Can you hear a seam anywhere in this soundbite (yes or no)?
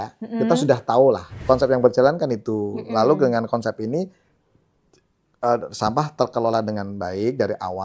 yes